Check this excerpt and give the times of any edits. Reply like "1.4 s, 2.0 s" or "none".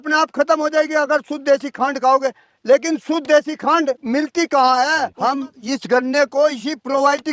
5.1 s

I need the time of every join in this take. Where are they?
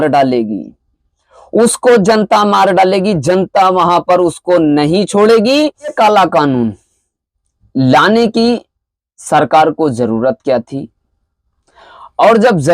5.9 s

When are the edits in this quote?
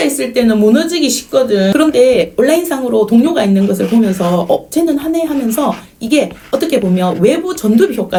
none

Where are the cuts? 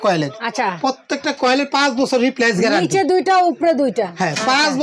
none

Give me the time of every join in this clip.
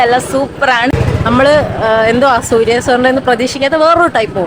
0.9 s

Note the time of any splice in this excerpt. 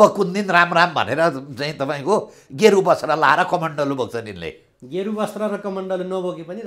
none

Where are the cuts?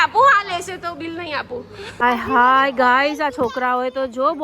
2.0 s

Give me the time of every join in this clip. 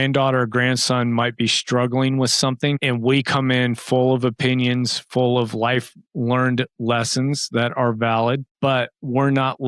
2.8 s

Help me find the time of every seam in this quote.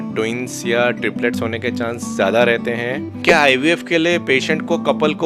3.2 s

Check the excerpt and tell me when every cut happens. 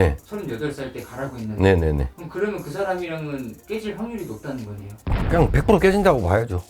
none

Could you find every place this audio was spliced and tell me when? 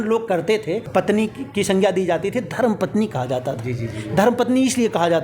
1.0 s

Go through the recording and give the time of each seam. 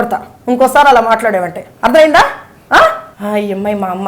3.1 s

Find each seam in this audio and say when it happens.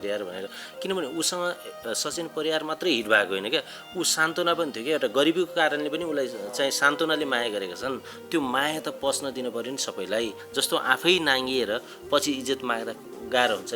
10.4 s

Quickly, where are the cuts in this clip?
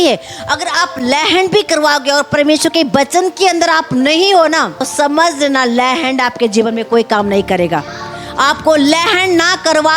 4.8 s

